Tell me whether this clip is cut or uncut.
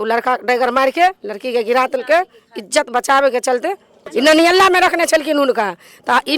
cut